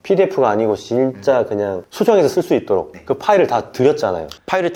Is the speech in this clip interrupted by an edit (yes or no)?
no